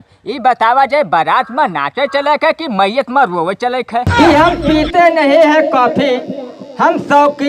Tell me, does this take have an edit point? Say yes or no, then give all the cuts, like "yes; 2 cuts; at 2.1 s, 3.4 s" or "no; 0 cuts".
yes; 1 cut; at 4.1 s